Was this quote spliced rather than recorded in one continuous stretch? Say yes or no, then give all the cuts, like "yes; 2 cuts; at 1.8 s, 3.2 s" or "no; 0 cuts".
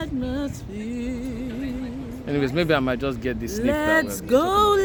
no; 0 cuts